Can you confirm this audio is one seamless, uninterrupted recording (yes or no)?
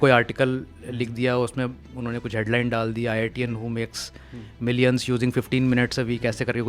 yes